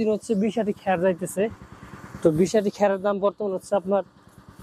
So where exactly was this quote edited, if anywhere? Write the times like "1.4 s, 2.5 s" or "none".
none